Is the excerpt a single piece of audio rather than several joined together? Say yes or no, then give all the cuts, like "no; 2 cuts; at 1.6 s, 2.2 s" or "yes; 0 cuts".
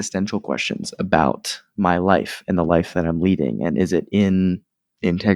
yes; 0 cuts